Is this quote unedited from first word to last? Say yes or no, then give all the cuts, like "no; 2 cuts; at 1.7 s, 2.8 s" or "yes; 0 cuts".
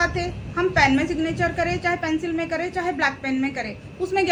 yes; 0 cuts